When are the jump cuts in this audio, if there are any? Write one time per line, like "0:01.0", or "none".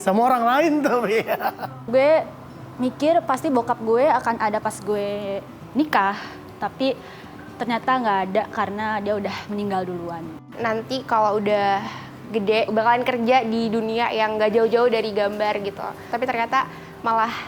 0:01.7
0:10.4
0:16.1